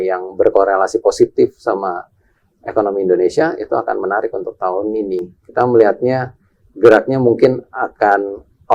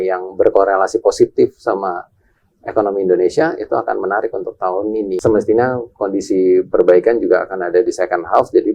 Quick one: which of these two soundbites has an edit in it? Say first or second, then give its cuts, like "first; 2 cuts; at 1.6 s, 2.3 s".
second; 1 cut; at 5.1 s